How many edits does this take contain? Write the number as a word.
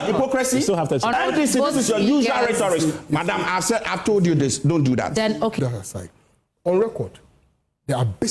two